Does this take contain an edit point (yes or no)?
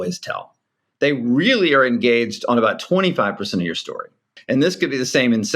yes